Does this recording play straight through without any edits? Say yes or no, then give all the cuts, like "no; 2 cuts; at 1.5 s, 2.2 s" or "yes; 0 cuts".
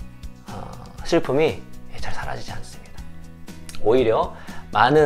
yes; 0 cuts